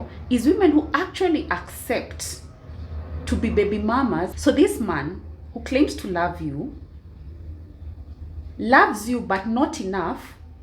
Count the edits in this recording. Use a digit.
1